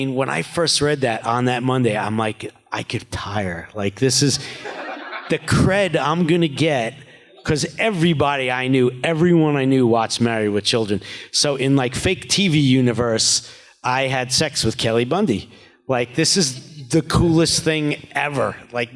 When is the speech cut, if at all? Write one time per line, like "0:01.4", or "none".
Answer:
0:03.1